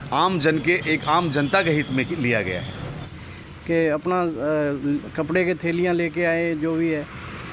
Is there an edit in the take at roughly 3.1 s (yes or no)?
yes